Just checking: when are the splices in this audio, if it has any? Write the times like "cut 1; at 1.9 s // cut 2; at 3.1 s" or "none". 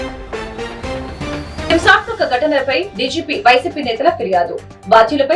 cut 1; at 1.7 s